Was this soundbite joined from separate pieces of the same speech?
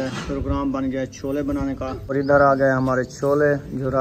yes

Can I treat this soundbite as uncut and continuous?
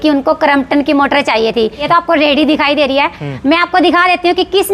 no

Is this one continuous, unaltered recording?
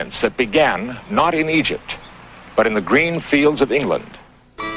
no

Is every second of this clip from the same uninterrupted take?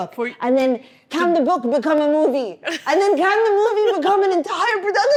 yes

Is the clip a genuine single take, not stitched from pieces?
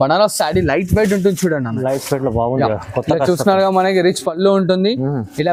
yes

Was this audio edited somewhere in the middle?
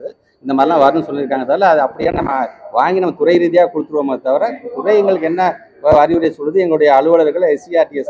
no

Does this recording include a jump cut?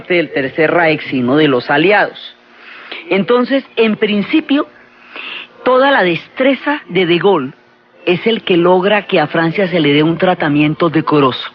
yes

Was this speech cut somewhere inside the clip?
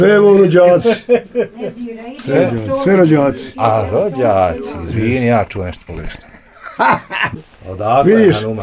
yes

